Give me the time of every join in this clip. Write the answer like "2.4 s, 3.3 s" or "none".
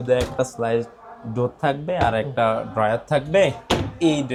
none